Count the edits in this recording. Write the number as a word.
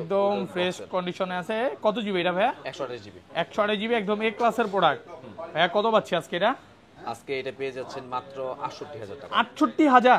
zero